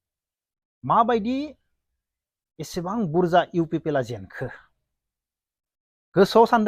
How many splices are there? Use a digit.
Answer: 0